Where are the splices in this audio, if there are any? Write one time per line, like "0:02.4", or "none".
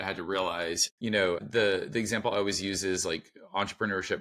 0:01.0